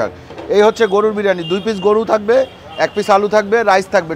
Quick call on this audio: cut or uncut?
uncut